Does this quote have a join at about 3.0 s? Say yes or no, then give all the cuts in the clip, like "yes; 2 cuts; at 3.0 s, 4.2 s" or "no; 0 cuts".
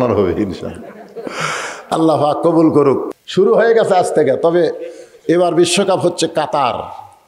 yes; 1 cut; at 3.0 s